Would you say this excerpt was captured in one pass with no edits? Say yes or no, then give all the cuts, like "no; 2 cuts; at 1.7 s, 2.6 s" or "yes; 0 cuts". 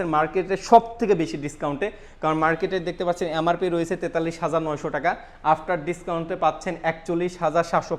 yes; 0 cuts